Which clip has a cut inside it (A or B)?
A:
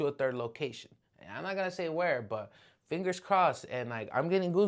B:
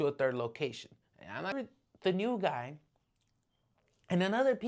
B